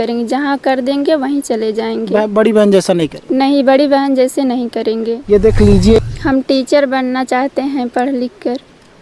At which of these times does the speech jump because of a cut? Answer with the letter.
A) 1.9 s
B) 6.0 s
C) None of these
B